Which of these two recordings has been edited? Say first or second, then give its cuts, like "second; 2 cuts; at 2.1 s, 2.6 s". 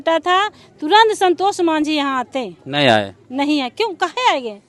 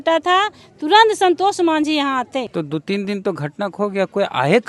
second; 1 cut; at 2.5 s